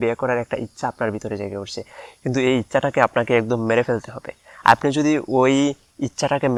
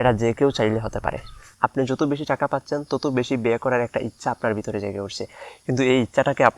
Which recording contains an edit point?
second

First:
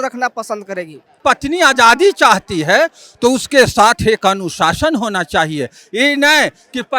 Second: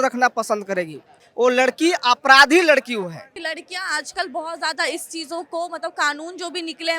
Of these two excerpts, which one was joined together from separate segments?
first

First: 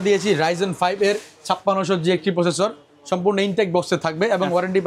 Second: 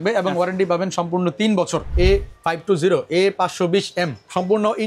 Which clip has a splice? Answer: second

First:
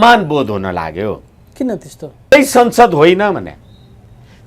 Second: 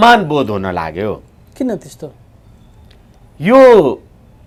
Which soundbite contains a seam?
first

